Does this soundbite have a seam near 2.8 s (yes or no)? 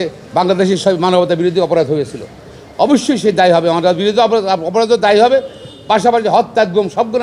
no